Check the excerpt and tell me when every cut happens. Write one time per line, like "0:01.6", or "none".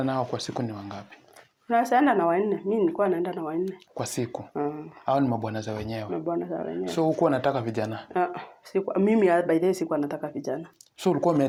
none